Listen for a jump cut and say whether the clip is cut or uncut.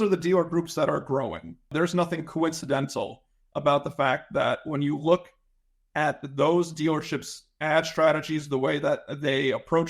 cut